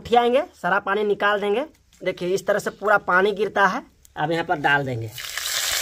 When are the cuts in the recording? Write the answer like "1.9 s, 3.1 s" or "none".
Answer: 1.8 s, 4.0 s